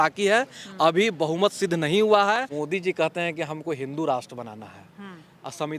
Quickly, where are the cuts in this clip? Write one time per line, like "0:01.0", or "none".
0:02.4